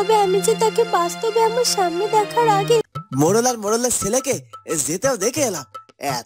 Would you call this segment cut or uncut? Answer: cut